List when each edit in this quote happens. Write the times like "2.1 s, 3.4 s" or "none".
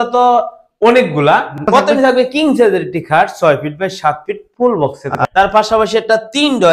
1.7 s, 5.2 s